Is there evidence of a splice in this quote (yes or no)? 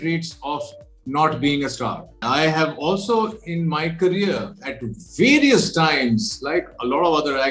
yes